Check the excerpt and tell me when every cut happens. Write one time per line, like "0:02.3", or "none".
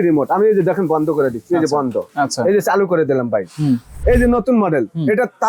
0:03.9